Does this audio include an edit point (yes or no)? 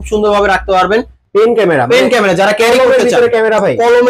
yes